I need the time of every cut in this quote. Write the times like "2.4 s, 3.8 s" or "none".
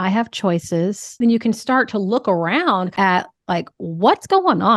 1.0 s, 2.9 s